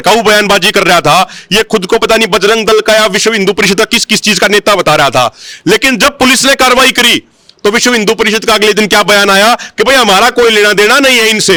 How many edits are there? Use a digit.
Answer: 0